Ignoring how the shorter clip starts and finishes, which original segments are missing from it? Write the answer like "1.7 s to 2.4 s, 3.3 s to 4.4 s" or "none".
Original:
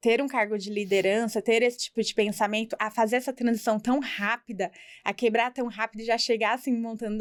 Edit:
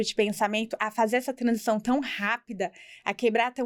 none